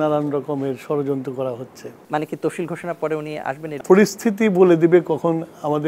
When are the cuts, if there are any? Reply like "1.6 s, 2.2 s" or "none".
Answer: 2.0 s, 3.7 s